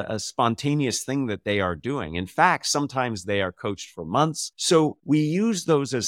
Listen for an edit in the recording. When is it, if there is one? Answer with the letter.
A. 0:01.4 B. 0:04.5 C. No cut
B